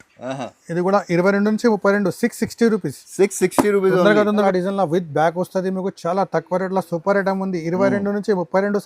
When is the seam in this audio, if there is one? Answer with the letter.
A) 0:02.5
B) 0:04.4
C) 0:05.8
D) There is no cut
B